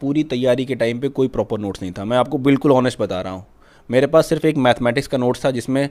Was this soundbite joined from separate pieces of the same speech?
no; 0 cuts

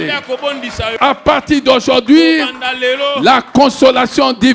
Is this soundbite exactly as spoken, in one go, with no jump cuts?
yes; 0 cuts

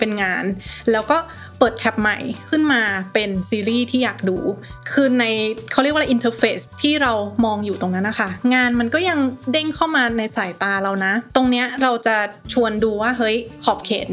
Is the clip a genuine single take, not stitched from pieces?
yes; 0 cuts

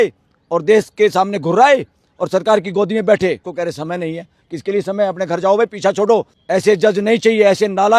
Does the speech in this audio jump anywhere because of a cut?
yes; 2 cuts; at 3.5 s, 6.4 s

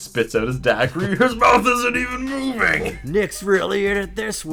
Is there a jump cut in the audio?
no; 0 cuts

